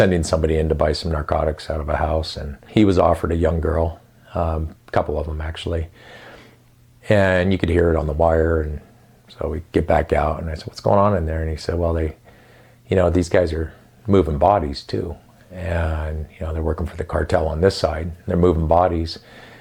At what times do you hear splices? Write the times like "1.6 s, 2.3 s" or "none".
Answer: 2.6 s